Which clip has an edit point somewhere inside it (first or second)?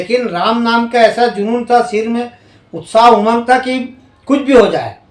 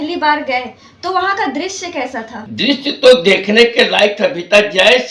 second